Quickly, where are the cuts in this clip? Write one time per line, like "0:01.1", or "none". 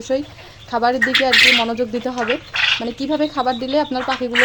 none